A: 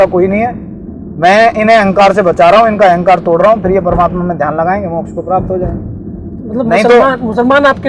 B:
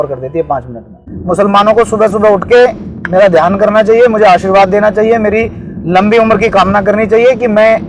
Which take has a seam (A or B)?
B